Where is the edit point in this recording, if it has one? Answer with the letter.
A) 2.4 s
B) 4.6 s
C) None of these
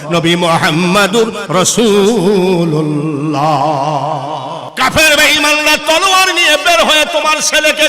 B